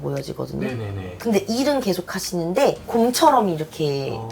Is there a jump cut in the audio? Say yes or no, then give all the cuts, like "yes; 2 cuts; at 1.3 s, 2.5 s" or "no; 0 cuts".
yes; 1 cut; at 2.8 s